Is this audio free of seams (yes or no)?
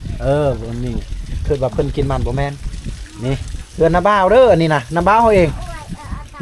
yes